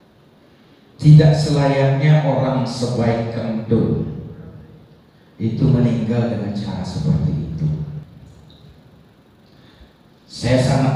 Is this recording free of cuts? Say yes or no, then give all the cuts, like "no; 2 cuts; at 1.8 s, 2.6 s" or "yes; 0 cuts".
no; 1 cut; at 8.0 s